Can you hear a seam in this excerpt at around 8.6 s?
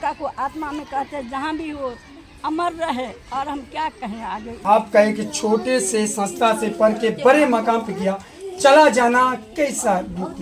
no; 1 cut; at 4.6 s

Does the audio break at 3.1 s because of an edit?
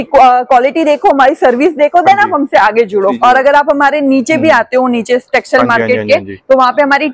yes; 1 cut; at 3.1 s

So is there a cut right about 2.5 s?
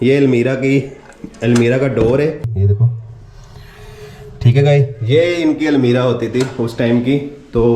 yes; 1 cut; at 2.5 s

